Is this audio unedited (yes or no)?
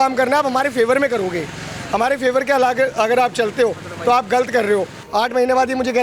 no